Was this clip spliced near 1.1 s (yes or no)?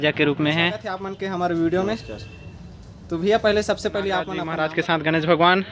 yes